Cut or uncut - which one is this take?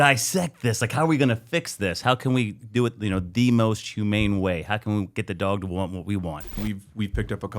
cut